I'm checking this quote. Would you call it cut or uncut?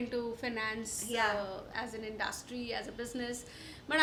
uncut